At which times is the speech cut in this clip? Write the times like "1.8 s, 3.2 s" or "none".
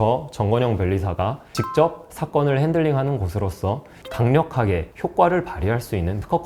4.0 s